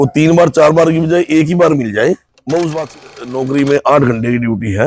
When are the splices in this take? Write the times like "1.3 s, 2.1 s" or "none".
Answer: 3.1 s